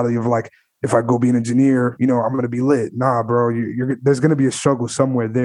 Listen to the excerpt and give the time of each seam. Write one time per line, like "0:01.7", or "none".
none